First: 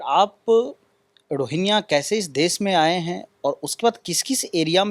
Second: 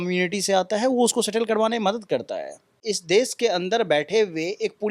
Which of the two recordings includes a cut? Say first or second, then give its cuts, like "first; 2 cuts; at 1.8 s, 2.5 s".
second; 1 cut; at 2.8 s